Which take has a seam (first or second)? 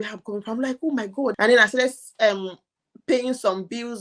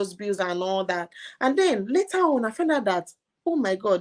first